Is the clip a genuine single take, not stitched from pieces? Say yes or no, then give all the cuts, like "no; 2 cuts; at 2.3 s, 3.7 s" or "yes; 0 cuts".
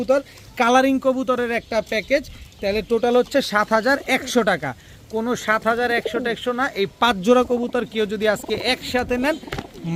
yes; 0 cuts